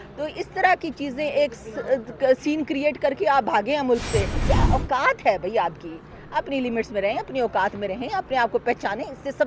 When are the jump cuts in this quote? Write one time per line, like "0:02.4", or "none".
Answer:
0:04.3